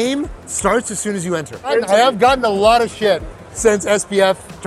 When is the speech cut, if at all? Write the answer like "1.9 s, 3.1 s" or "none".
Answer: 1.7 s